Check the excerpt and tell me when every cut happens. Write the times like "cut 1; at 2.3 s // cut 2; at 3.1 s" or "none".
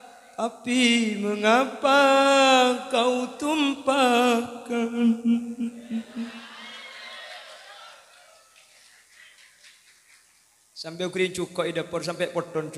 none

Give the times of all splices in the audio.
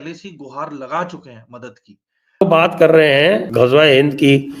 cut 1; at 2.4 s // cut 2; at 3.5 s

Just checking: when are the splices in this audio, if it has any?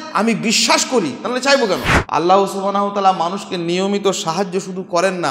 cut 1; at 1.9 s

